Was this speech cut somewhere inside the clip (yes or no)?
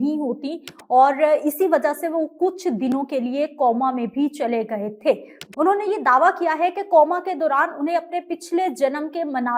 no